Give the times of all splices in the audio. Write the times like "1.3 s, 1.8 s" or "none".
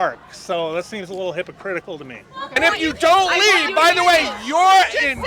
2.6 s